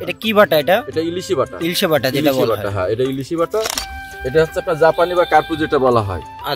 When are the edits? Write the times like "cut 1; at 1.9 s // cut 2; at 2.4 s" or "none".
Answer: cut 1; at 3.7 s